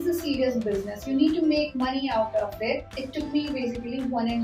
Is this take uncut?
no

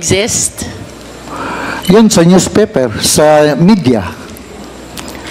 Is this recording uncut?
yes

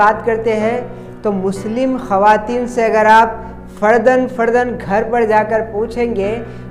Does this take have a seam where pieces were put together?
no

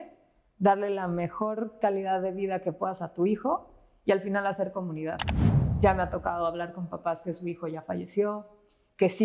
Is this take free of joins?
no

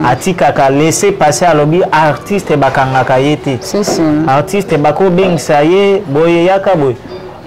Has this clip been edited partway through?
no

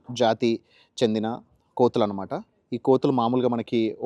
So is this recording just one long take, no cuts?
yes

